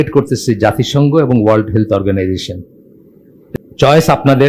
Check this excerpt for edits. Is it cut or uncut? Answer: cut